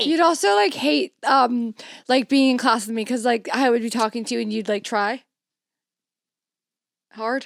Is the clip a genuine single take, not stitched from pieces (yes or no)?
yes